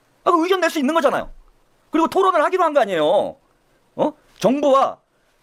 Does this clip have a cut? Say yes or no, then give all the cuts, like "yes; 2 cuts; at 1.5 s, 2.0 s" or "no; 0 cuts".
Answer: no; 0 cuts